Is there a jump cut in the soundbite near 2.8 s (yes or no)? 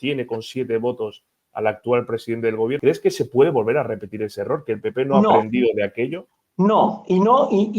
yes